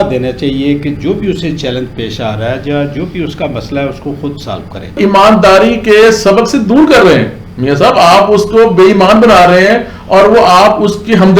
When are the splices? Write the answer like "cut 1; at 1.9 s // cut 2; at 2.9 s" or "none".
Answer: cut 1; at 5.0 s